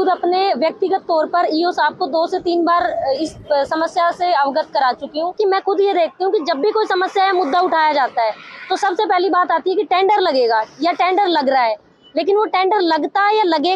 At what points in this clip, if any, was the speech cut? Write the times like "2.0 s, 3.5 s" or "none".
5.4 s